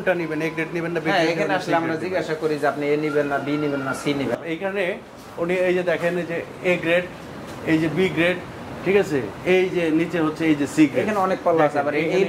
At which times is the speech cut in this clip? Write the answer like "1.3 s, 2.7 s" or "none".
4.4 s